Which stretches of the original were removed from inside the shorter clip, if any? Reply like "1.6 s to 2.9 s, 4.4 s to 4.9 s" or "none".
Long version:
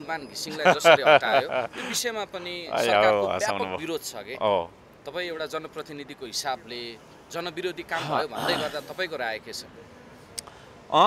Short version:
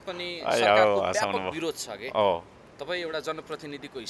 none